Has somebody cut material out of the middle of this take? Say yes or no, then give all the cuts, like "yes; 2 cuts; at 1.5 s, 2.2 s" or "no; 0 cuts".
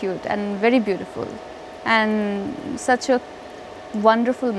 no; 0 cuts